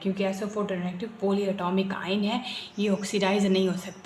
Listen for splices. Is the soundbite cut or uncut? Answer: uncut